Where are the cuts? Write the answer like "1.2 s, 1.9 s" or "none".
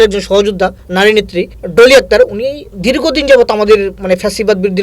0.8 s, 1.6 s